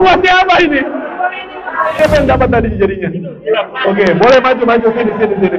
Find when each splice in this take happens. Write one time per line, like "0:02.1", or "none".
none